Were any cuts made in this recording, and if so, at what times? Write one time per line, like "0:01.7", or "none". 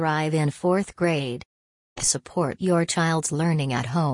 0:02.0